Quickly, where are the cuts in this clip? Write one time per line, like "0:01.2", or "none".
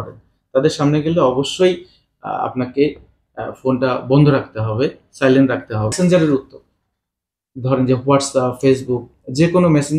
0:05.9

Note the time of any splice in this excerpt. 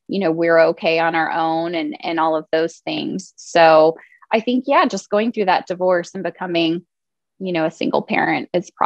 none

